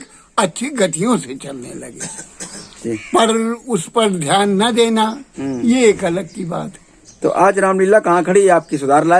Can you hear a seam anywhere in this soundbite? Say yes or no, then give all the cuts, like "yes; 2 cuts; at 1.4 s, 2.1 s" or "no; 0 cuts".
no; 0 cuts